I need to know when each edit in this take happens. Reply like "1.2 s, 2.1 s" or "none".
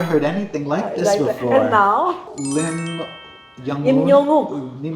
2.3 s